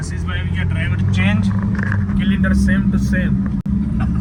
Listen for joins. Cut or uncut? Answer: uncut